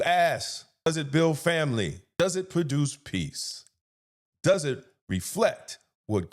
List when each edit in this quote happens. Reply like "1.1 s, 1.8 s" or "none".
0.9 s, 2.0 s